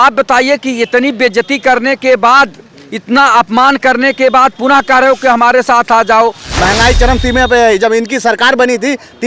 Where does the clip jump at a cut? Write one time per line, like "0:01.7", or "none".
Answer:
0:06.5